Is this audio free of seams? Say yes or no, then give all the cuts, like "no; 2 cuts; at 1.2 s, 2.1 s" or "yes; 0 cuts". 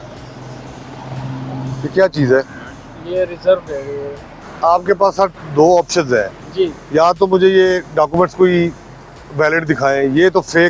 no; 1 cut; at 4.4 s